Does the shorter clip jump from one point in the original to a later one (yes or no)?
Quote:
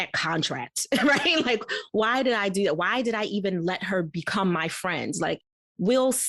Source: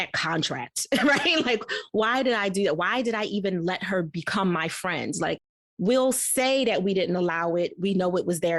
no